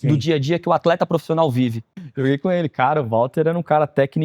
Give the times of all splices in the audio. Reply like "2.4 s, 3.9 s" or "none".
1.9 s